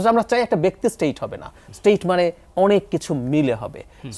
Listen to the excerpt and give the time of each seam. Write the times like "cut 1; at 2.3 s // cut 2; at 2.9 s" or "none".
none